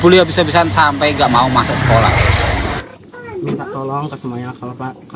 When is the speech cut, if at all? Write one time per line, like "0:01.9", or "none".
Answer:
0:02.8